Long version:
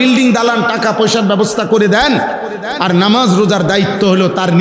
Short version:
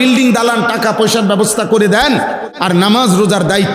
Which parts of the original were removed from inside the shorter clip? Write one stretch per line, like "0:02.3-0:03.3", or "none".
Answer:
0:02.5-0:02.7